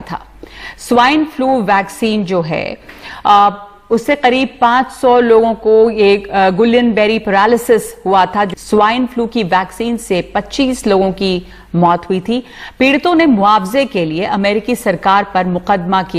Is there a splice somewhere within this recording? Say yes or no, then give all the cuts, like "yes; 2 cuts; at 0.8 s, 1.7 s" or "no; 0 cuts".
yes; 1 cut; at 8.5 s